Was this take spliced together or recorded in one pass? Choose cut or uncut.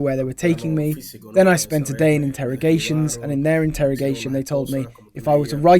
uncut